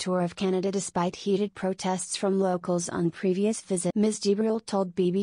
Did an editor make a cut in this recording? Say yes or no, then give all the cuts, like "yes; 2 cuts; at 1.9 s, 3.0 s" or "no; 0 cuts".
yes; 1 cut; at 3.9 s